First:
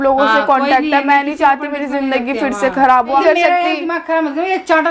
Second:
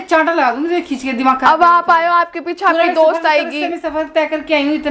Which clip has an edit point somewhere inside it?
first; 1 cut; at 3.2 s

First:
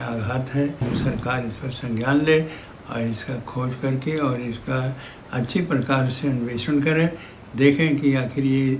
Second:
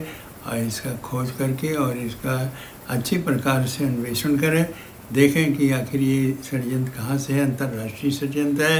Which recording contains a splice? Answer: first; 1 cut; at 0.9 s

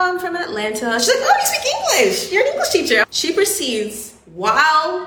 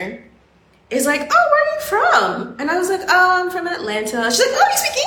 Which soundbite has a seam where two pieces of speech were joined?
first; 1 cut; at 3.0 s

